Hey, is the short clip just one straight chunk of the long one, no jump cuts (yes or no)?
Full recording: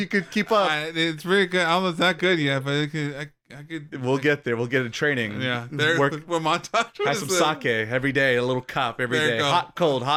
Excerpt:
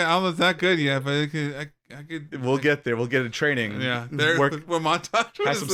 yes